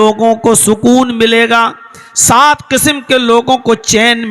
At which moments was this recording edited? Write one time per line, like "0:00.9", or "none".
none